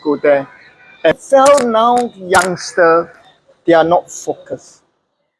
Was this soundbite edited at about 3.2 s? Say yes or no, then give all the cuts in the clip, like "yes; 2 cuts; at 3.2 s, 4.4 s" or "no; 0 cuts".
no; 1 cut; at 1.2 s